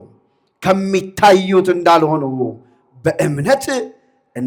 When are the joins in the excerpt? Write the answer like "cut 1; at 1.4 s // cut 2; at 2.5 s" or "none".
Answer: none